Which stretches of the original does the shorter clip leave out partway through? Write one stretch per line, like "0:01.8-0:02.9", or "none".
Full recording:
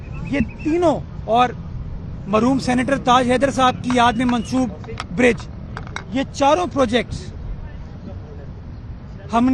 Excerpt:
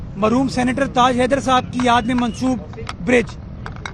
none